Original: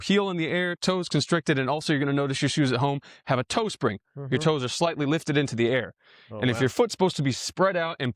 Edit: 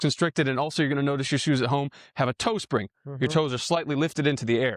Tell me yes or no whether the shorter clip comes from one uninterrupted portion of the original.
yes